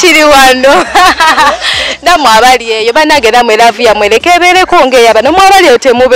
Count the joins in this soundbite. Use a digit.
0